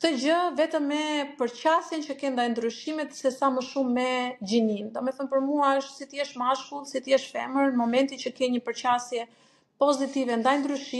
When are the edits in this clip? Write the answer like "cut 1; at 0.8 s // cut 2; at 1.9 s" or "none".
none